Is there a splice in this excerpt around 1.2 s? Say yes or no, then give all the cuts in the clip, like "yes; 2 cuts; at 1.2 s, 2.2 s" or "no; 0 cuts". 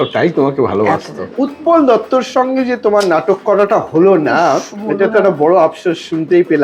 yes; 1 cut; at 1.2 s